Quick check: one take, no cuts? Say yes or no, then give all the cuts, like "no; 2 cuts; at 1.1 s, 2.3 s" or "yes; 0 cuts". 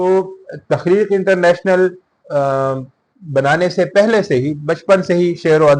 yes; 0 cuts